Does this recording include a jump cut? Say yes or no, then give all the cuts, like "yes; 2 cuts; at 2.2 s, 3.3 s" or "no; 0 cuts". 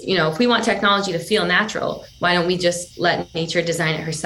no; 0 cuts